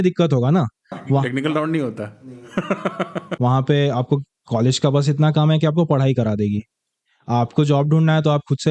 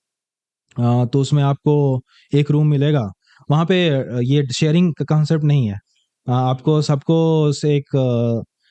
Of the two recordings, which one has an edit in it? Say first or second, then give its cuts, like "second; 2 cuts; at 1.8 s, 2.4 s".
first; 1 cut; at 3.3 s